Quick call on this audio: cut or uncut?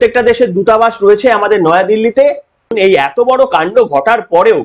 cut